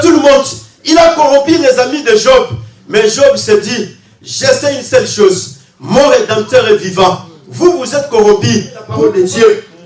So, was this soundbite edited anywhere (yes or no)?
yes